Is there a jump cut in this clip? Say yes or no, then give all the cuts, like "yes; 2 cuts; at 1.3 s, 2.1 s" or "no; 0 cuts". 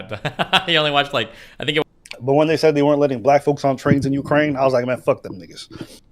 yes; 1 cut; at 1.8 s